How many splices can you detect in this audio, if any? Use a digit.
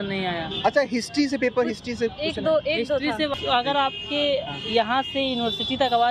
1